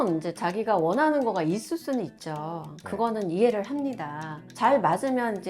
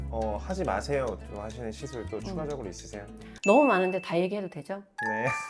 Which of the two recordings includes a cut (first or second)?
first